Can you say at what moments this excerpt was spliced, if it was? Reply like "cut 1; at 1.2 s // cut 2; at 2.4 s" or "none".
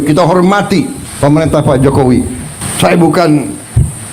cut 1; at 1.0 s // cut 2; at 2.6 s

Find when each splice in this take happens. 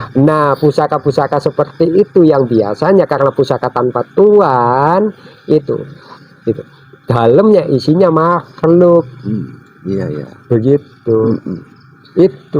none

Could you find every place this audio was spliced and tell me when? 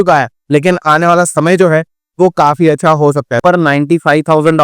cut 1; at 3.3 s

